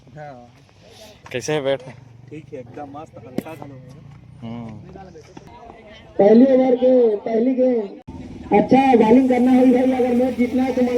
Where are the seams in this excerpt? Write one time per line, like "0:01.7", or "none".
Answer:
0:05.5